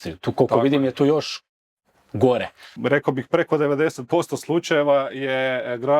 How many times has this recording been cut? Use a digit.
1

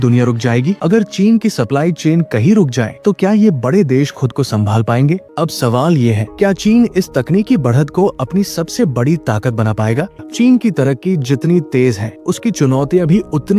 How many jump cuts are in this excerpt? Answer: 3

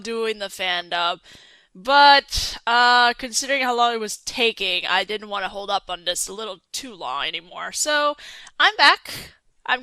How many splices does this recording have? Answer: 0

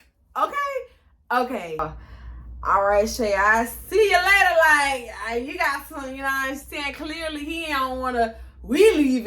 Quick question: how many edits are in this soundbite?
1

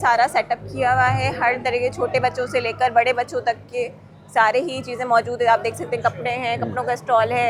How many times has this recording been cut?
0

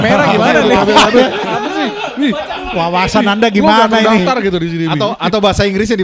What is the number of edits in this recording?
0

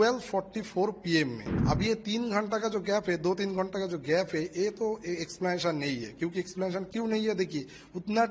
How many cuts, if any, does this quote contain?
1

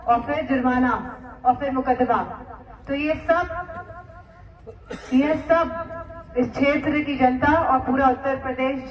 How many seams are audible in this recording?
0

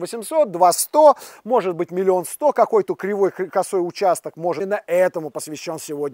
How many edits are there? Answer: 1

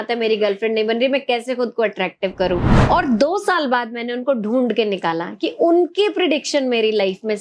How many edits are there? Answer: 1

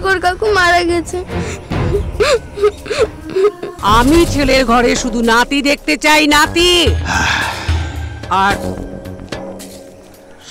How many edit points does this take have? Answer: 1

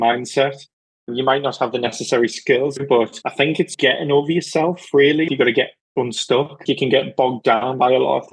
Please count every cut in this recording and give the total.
3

